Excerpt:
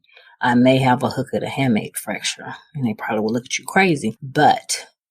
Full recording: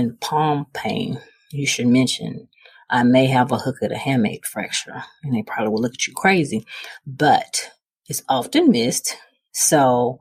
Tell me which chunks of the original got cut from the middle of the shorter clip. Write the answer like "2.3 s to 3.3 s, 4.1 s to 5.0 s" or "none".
6.7 s to 7.0 s